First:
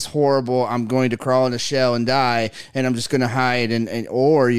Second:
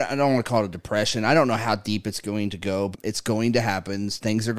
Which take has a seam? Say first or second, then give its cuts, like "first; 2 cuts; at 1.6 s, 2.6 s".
second; 1 cut; at 2.9 s